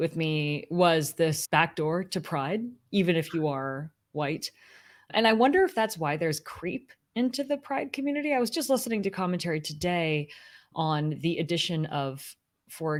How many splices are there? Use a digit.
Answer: 0